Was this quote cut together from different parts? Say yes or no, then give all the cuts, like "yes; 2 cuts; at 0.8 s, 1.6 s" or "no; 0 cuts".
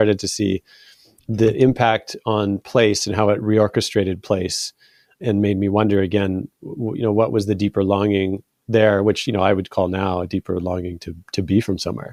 no; 0 cuts